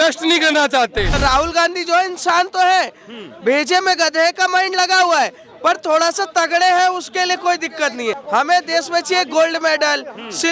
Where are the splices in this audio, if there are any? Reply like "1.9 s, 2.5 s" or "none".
1.1 s, 8.2 s